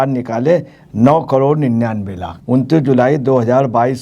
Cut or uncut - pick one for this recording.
cut